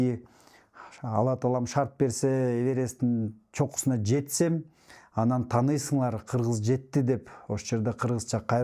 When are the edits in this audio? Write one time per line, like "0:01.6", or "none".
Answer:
none